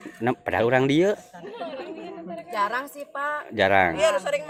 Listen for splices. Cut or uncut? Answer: uncut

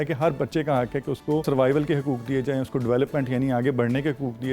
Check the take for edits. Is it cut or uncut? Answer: cut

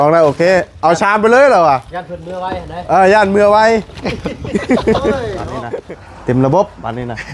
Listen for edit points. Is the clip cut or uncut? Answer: cut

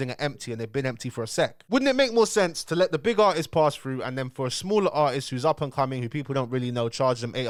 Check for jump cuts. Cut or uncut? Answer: uncut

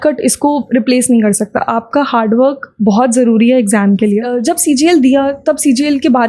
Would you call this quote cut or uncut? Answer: cut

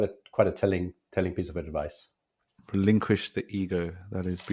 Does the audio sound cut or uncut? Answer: uncut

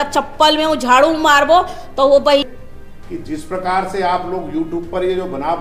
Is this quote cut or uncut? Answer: cut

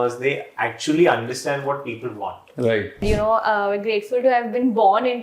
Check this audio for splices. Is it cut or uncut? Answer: cut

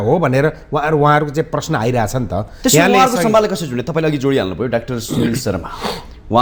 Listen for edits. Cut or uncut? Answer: uncut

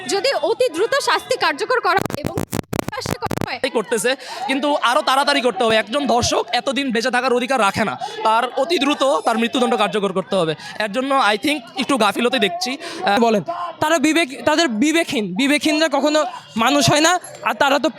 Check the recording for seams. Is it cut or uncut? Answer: cut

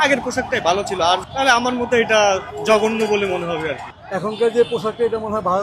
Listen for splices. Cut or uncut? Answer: cut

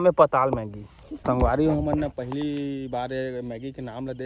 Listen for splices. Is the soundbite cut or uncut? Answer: cut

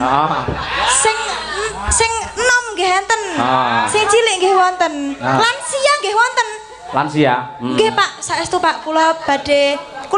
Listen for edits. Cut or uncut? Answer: uncut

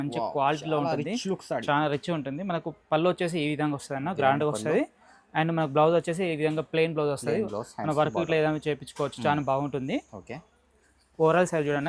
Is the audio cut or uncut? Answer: uncut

